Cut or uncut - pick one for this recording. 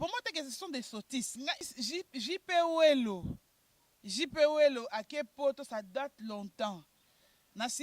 cut